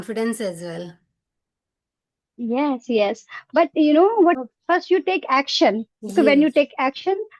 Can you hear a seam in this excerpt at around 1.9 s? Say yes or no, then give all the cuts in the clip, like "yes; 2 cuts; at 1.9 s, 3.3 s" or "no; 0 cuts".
no; 1 cut; at 4.4 s